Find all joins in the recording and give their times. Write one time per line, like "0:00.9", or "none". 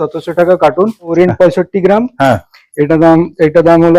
0:01.1